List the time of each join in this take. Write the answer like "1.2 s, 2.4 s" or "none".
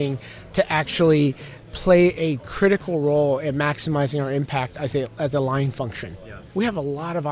6.2 s